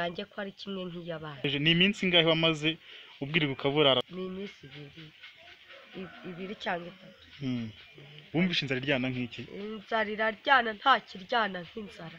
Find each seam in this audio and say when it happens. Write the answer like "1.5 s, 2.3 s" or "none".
1.5 s, 4.1 s